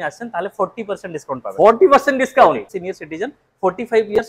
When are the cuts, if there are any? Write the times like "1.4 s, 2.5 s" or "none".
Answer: 2.7 s